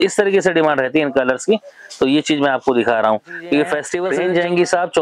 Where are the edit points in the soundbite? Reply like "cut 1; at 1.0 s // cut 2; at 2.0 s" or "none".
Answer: cut 1; at 4.0 s